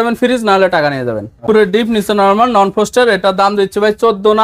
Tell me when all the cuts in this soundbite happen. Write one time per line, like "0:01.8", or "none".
0:01.4